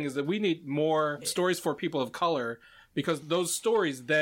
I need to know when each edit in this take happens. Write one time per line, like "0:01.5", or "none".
0:01.2
0:03.2